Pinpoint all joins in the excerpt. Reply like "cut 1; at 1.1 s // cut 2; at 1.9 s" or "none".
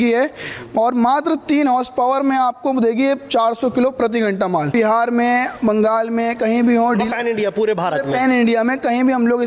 cut 1; at 4.7 s